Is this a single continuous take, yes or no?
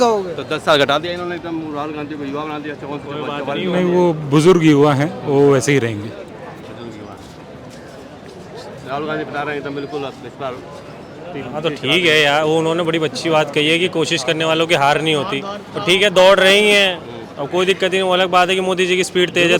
yes